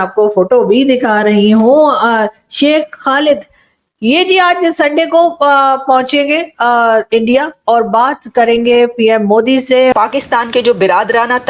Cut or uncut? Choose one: cut